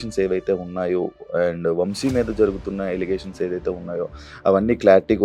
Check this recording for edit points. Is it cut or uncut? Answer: uncut